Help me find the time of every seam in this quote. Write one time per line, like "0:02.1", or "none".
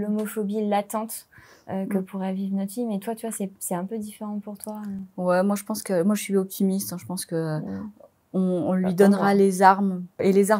none